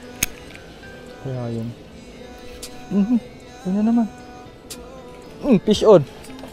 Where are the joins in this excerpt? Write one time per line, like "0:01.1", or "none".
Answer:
none